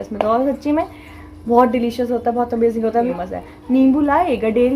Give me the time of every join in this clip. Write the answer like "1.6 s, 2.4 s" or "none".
3.1 s